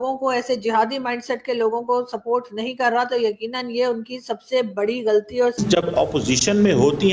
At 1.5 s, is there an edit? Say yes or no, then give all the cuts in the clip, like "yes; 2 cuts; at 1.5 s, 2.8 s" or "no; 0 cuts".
no; 1 cut; at 5.6 s